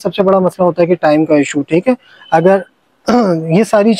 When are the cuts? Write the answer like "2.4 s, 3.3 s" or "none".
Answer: none